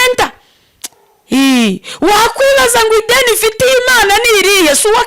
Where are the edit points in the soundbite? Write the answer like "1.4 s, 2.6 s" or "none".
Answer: none